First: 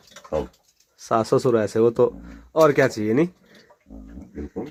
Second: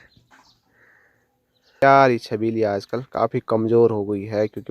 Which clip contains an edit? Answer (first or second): second